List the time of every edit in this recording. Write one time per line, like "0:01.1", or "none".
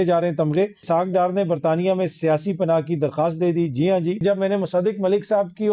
0:00.8
0:04.2